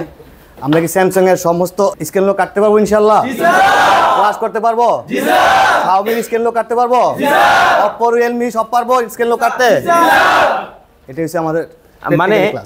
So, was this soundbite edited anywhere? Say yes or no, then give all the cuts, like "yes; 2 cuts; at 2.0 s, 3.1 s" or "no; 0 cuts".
yes; 1 cut; at 1.9 s